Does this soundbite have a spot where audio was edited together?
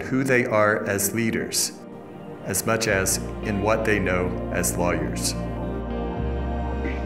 no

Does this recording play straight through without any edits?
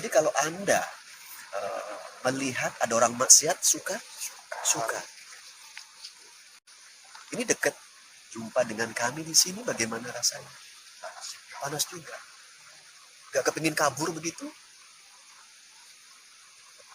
no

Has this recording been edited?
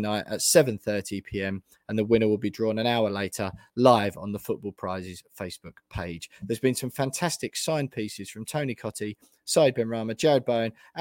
no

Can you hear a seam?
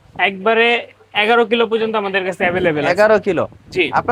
no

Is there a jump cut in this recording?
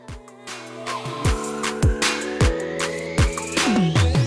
no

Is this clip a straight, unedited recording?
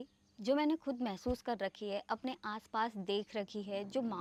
yes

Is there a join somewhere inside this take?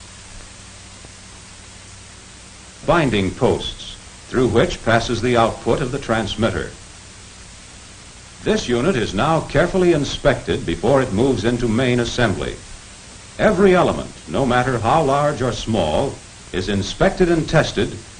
no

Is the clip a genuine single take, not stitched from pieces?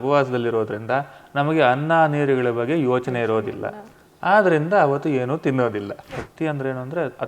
no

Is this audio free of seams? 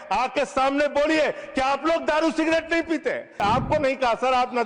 no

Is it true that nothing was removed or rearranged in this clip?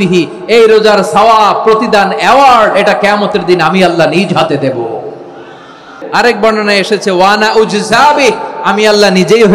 no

